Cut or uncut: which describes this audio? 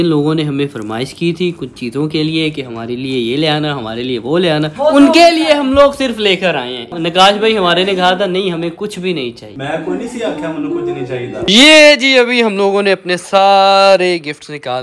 cut